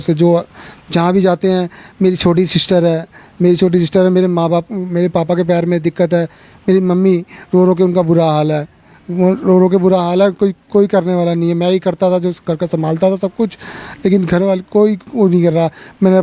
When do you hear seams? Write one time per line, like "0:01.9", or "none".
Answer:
none